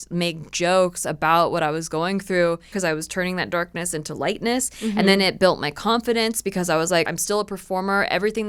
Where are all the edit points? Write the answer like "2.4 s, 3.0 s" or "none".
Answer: 2.8 s, 7.1 s

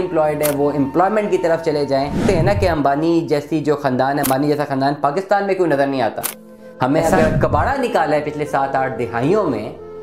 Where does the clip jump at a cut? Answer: 2.2 s, 7.4 s

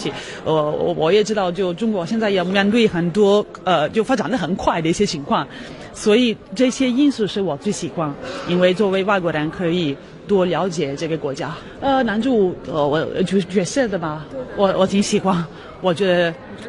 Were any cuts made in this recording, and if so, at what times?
10.8 s

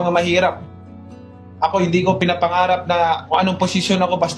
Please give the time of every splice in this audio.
3.2 s

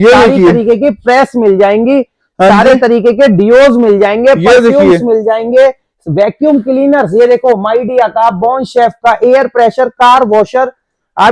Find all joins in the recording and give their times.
none

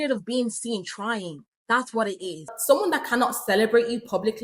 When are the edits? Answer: 2.5 s

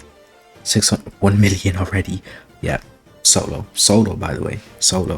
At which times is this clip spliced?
none

